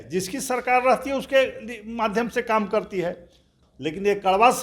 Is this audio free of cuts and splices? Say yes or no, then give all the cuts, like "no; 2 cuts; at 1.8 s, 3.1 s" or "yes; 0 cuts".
no; 1 cut; at 3.5 s